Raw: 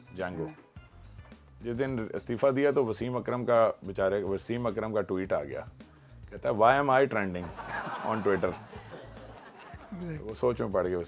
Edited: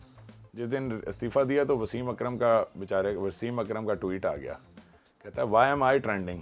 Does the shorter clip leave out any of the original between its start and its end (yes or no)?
no